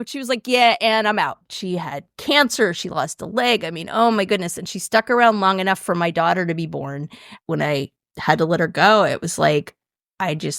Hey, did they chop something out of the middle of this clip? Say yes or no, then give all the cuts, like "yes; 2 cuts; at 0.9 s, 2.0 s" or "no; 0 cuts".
yes; 2 cuts; at 1.5 s, 7.4 s